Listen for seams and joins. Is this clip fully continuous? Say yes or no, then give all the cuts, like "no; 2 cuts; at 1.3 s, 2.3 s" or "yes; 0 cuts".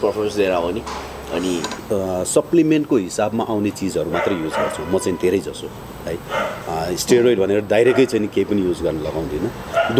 no; 1 cut; at 1.7 s